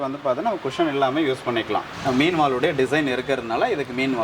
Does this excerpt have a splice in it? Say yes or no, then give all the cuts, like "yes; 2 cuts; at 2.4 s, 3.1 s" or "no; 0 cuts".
yes; 1 cut; at 1.9 s